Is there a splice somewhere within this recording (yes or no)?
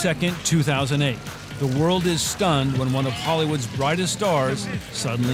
no